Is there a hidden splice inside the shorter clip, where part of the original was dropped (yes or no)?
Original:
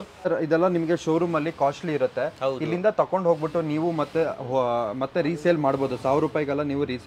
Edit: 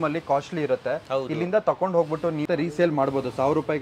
yes